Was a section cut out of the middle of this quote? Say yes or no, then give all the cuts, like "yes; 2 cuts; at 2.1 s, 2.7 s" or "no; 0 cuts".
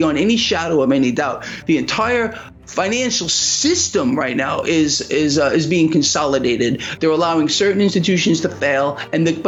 no; 0 cuts